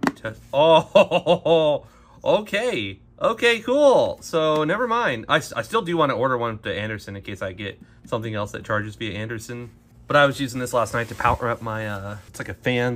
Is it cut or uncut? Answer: uncut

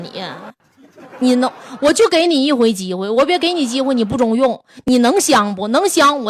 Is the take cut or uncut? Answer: uncut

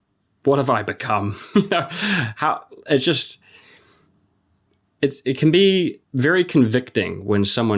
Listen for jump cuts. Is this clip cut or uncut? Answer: cut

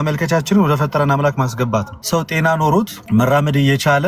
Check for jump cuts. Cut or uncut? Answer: cut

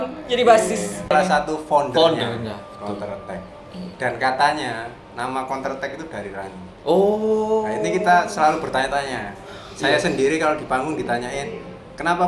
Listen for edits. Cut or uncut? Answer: cut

